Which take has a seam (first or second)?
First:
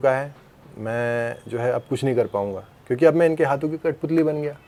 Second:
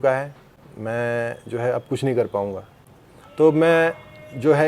second